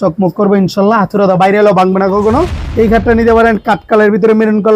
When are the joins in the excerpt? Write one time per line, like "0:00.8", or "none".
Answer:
0:02.6